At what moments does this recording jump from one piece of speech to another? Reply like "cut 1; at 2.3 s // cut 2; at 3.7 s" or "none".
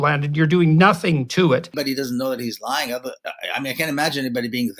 cut 1; at 1.8 s